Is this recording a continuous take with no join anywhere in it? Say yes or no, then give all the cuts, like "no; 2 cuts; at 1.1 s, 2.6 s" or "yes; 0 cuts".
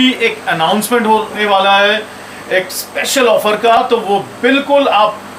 yes; 0 cuts